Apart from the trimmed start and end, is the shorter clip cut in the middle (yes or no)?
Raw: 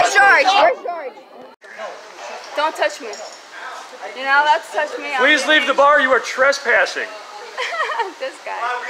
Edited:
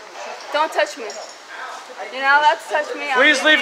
no